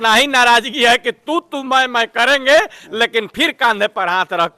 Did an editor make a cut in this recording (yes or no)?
no